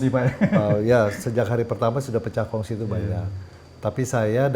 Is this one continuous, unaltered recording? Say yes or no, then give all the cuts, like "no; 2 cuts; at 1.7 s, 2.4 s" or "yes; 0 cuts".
yes; 0 cuts